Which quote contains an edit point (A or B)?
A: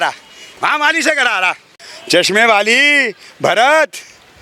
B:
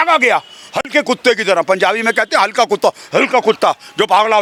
A